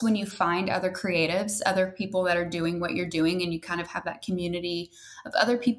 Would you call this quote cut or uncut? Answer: uncut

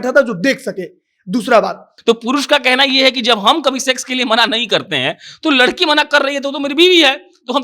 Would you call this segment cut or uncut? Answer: cut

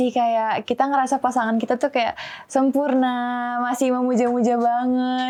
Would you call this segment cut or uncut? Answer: uncut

